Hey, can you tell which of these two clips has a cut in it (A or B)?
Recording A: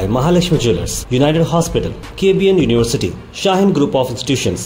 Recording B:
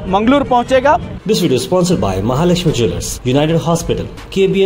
B